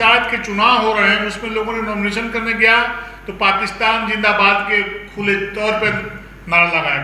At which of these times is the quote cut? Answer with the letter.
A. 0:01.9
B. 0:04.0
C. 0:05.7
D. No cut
D